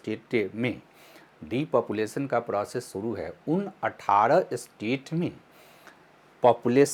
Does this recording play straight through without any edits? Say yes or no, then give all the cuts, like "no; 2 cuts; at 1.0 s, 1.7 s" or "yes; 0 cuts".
yes; 0 cuts